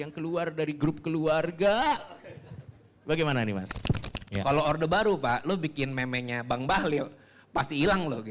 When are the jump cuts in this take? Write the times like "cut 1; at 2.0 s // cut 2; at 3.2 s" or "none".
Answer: cut 1; at 4.1 s

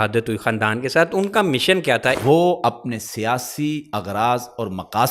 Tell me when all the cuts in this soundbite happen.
cut 1; at 2.2 s

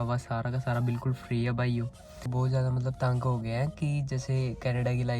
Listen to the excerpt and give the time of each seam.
cut 1; at 2.3 s

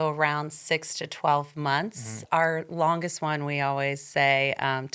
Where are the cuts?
cut 1; at 2.1 s

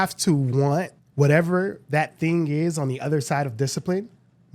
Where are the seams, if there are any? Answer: cut 1; at 1.0 s

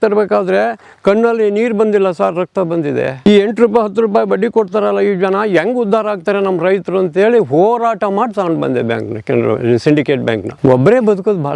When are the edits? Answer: cut 1; at 3.3 s // cut 2; at 10.5 s

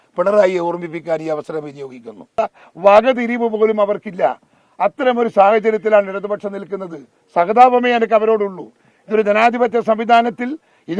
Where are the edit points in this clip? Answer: cut 1; at 2.3 s

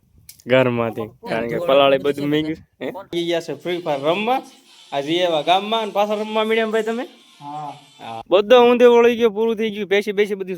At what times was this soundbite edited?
cut 1; at 3.1 s // cut 2; at 8.2 s

